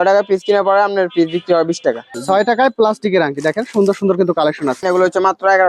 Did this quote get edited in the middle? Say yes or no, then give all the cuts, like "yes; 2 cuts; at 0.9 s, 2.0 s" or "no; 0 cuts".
yes; 2 cuts; at 2.1 s, 4.8 s